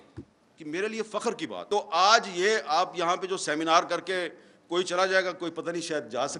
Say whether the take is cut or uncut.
cut